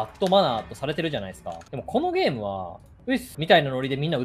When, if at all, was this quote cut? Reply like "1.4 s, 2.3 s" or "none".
3.3 s